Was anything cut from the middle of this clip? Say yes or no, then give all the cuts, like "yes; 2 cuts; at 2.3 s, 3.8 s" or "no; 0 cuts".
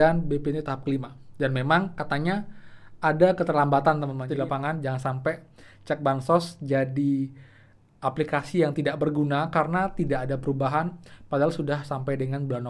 yes; 1 cut; at 4.2 s